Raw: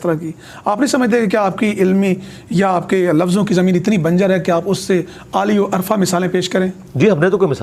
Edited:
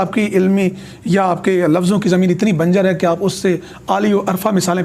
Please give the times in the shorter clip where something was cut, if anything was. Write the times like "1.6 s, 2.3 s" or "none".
none